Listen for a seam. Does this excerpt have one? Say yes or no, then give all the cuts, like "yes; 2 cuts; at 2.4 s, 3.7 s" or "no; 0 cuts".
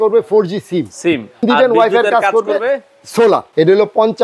yes; 2 cuts; at 1.4 s, 3.5 s